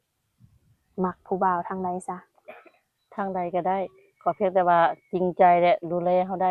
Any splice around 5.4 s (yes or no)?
no